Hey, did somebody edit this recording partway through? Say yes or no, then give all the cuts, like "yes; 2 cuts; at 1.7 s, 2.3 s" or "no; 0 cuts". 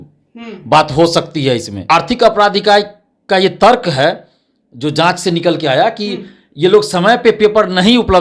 yes; 1 cut; at 1.7 s